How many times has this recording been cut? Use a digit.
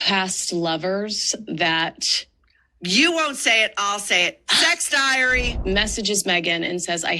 1